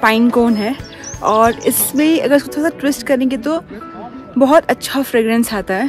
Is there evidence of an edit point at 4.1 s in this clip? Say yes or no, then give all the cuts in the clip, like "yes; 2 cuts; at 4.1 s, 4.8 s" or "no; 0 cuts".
no; 0 cuts